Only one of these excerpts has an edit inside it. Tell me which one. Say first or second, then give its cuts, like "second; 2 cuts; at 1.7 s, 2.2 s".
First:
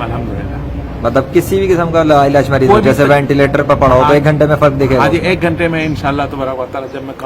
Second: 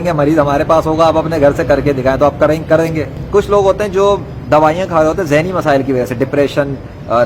second; 1 cut; at 3.2 s